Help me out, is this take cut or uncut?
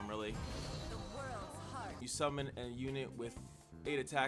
cut